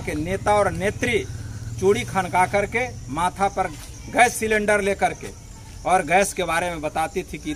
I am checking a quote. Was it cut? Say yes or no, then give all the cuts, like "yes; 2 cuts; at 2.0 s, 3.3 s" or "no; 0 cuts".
no; 0 cuts